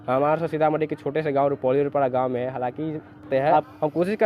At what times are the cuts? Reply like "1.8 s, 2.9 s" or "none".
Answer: 3.2 s

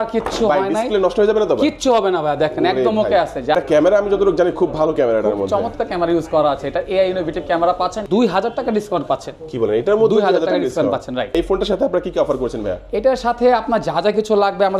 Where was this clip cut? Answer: 3.5 s, 8.0 s, 11.3 s

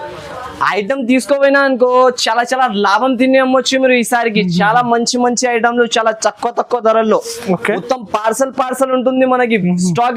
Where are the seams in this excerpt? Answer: none

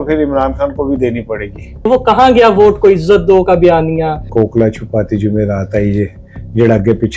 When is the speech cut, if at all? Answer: 1.9 s, 4.3 s

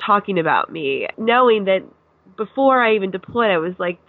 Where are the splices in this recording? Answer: 1.1 s

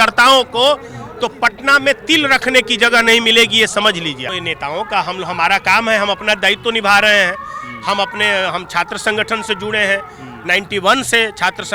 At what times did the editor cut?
none

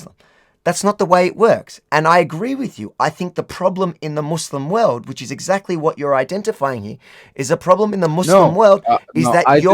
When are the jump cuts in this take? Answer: 1.7 s

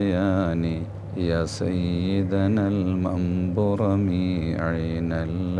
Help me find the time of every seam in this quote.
1.0 s

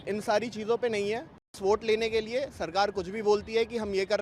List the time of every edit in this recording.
1.6 s

